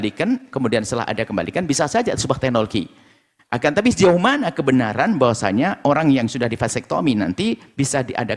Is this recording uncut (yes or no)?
yes